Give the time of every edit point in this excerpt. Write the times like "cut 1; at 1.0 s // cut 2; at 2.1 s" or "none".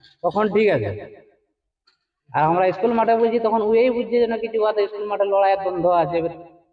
none